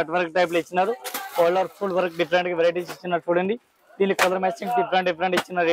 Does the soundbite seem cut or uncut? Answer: uncut